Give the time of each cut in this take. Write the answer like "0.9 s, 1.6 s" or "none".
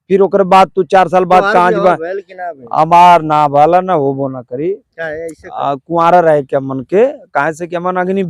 none